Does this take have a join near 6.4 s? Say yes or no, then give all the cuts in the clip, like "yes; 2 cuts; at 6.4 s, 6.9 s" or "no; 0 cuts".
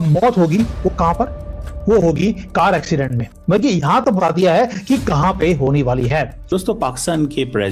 yes; 1 cut; at 6.4 s